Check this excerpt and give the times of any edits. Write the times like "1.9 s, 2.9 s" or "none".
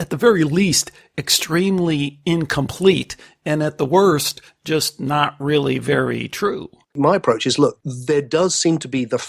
7.0 s, 7.9 s